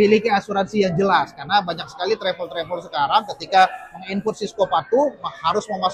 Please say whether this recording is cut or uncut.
uncut